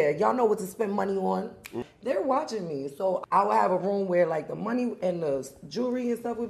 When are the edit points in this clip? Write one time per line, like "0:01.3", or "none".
0:01.8
0:03.2

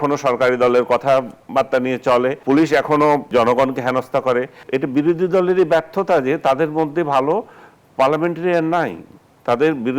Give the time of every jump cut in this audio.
0:02.4
0:03.2
0:04.6

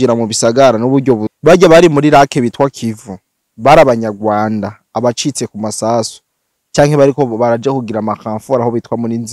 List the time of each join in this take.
0:01.3

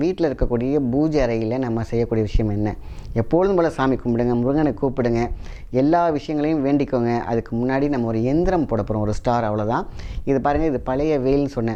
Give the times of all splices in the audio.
none

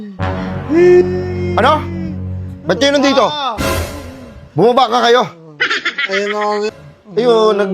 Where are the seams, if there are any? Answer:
0:06.7

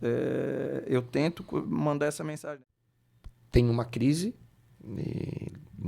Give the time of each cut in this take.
0:02.4

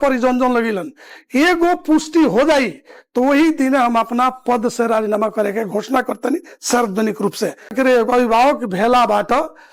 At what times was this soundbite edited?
0:07.7

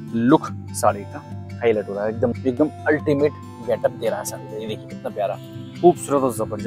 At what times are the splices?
0:02.4

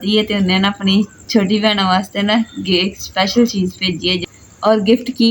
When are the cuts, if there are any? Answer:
0:04.2

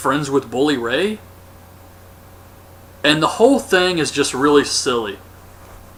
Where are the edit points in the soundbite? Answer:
none

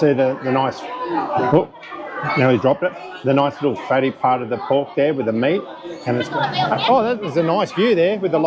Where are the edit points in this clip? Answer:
0:06.2

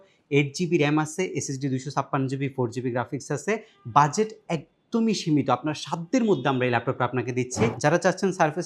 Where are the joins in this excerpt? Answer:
0:07.8

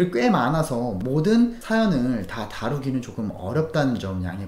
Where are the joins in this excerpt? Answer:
0:01.0
0:01.6

